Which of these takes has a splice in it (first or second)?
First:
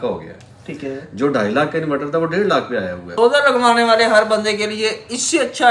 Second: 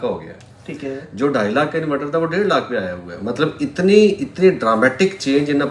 first